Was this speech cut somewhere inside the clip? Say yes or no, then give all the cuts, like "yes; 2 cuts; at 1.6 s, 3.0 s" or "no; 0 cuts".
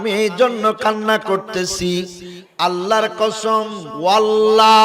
yes; 1 cut; at 3.8 s